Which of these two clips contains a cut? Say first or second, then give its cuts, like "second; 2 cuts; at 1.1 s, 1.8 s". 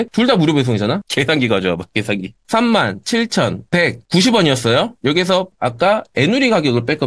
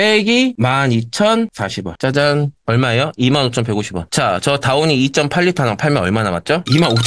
first; 3 cuts; at 1.0 s, 2.4 s, 5.5 s